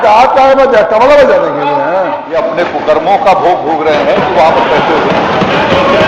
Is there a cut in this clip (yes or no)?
yes